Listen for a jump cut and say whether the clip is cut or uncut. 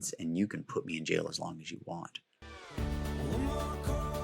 cut